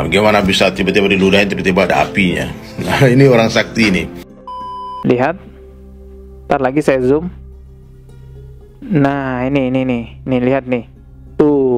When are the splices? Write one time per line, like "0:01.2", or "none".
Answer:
0:04.6